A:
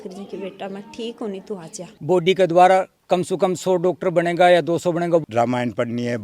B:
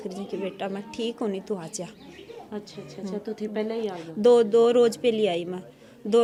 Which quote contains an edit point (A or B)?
A